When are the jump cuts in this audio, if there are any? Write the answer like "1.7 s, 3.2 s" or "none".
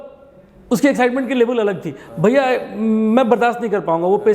none

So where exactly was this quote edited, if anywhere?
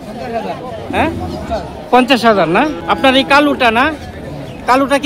2.8 s

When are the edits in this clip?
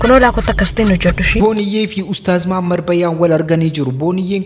1.4 s

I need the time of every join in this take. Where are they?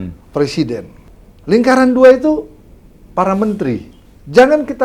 1.0 s, 4.0 s

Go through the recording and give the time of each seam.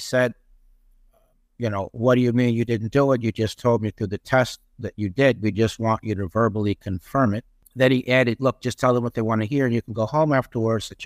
7.6 s

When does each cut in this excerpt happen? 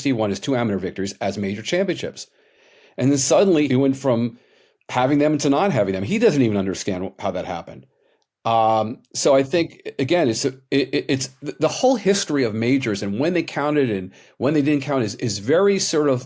3.7 s

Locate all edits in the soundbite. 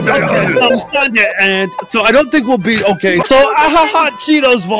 3.2 s

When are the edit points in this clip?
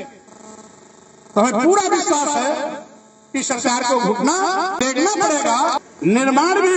5.8 s

